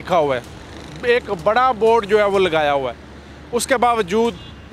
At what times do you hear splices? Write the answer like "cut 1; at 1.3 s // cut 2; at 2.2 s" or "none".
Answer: none